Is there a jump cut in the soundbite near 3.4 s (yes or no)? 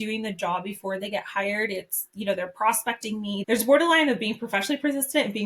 yes